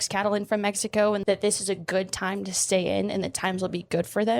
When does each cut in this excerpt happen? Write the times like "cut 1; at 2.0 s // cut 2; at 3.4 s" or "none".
cut 1; at 1.2 s